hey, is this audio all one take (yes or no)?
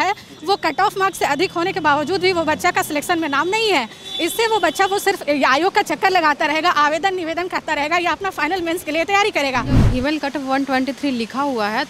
no